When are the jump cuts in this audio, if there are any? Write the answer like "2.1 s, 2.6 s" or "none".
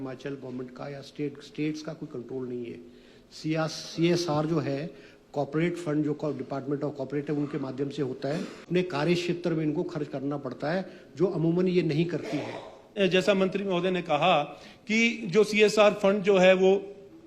8.6 s, 12.9 s